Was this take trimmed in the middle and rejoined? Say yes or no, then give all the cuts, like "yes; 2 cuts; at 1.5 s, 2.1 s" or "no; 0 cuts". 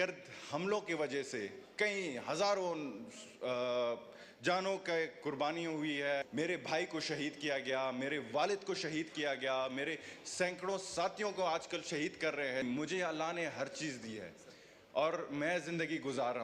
yes; 2 cuts; at 6.2 s, 12.6 s